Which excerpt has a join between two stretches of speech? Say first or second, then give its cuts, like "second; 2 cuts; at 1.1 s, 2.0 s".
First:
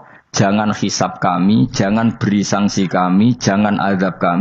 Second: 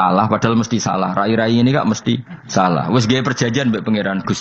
second; 1 cut; at 2.3 s